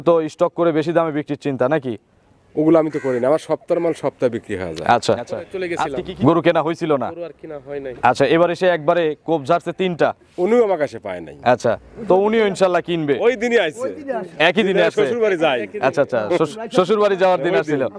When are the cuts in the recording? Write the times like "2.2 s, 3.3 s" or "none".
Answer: 5.6 s